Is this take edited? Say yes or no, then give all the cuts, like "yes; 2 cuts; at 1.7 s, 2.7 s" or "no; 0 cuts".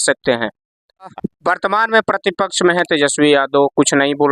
yes; 1 cut; at 1.1 s